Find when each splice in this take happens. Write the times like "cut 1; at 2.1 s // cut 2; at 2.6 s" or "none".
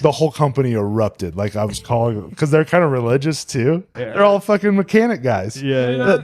cut 1; at 4.0 s